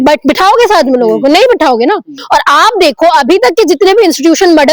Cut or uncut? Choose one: cut